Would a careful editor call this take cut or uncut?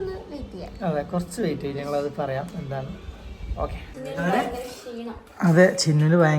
cut